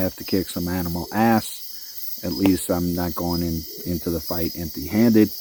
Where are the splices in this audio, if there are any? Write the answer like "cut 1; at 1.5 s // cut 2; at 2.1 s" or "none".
none